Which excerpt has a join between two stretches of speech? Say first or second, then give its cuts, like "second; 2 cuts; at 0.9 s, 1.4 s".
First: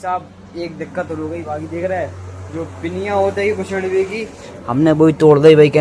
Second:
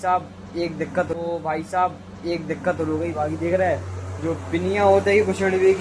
first; 1 cut; at 1.1 s